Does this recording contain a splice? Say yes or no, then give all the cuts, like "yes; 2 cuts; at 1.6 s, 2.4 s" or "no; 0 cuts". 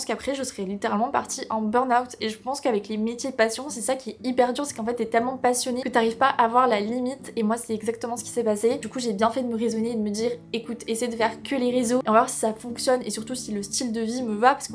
no; 0 cuts